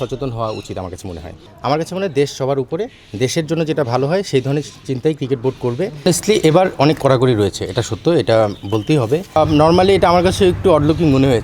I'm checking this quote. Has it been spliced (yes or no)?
yes